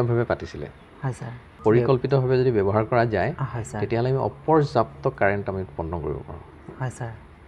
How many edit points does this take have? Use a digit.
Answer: 1